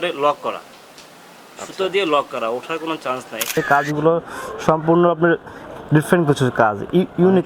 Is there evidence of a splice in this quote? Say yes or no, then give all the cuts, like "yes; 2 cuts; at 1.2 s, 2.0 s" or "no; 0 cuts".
yes; 1 cut; at 3.5 s